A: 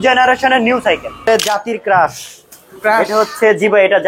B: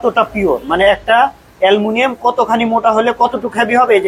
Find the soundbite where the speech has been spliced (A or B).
A